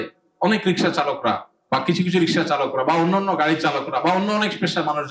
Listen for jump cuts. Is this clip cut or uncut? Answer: uncut